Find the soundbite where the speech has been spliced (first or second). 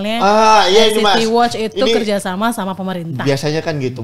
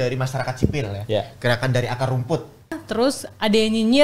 second